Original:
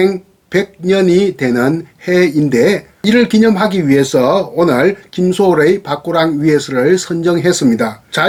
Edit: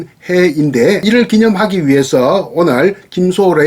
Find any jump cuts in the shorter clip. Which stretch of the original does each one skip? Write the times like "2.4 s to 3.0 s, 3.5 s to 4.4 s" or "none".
2.8 s to 3.0 s